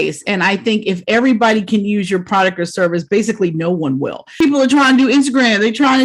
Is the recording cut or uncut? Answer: cut